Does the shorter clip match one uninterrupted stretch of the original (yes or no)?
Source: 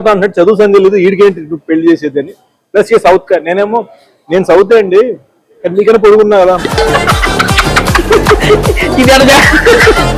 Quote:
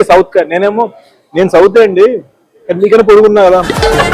yes